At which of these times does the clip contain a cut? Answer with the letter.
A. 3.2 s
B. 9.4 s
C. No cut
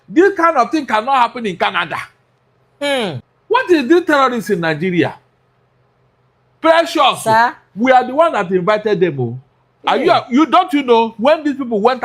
A